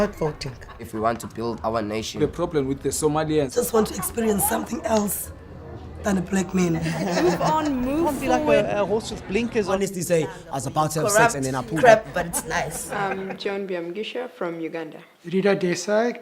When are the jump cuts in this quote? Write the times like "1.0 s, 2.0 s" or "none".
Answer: none